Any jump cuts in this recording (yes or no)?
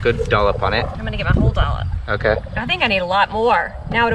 yes